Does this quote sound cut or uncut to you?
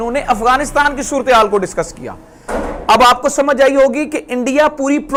uncut